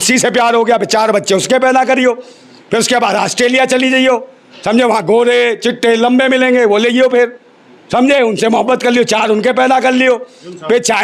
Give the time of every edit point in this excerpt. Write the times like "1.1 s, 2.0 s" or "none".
none